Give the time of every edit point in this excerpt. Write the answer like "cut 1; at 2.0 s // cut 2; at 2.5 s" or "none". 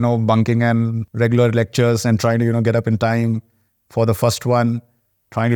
cut 1; at 1.0 s